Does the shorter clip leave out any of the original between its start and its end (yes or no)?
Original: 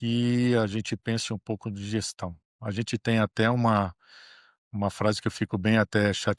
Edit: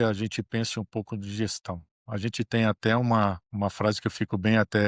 yes